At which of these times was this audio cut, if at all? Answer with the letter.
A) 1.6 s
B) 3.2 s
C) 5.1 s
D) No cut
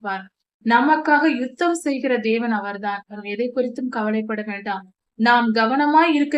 B